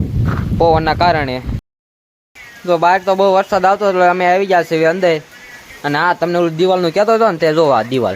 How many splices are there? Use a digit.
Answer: 1